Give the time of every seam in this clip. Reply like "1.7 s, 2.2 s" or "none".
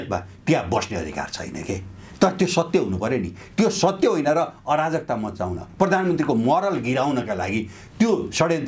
none